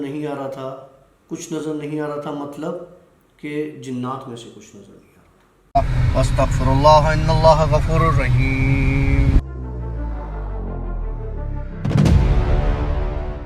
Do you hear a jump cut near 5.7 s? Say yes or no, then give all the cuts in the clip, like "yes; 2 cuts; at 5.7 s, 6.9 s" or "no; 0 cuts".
yes; 1 cut; at 5.7 s